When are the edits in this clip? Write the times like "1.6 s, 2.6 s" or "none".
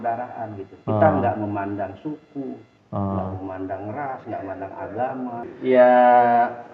5.5 s